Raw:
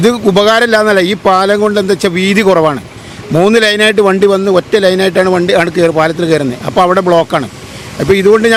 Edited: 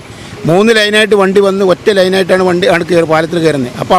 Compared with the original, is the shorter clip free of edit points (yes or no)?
yes